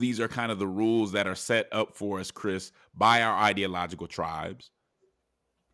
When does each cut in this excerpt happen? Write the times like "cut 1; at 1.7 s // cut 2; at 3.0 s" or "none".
none